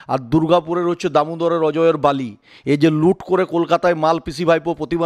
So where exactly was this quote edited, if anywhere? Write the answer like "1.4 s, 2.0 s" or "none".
none

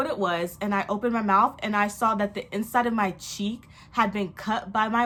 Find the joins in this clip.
none

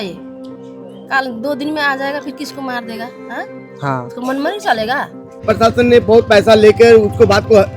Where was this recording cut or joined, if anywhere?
5.4 s

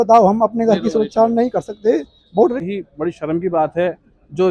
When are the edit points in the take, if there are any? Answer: 2.6 s

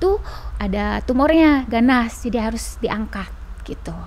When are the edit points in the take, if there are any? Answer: none

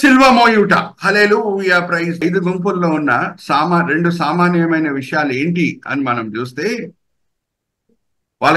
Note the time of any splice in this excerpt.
2.2 s

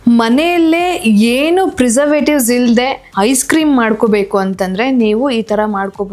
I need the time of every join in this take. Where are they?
3.0 s

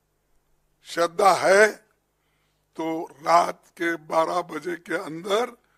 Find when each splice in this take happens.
none

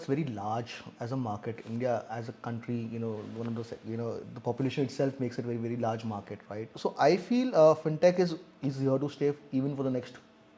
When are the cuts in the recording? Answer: 6.7 s

